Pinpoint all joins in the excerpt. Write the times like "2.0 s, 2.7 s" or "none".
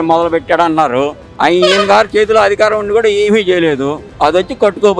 1.2 s, 4.0 s